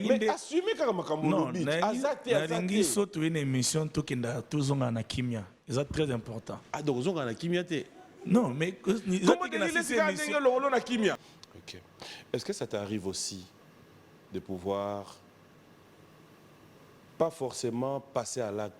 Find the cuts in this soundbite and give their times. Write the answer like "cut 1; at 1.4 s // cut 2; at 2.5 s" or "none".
cut 1; at 11.3 s